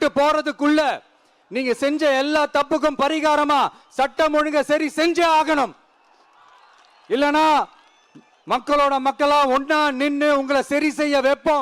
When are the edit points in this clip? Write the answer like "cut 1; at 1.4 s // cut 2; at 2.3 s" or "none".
none